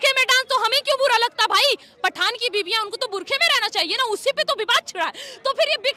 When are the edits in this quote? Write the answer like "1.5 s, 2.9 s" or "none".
none